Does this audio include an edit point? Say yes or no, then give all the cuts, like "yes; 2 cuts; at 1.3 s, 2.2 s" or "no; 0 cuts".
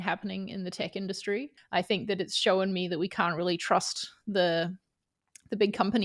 yes; 1 cut; at 1.6 s